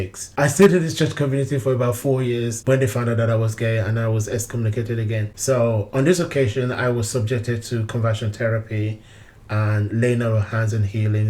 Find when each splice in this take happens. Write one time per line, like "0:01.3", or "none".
0:02.6
0:05.3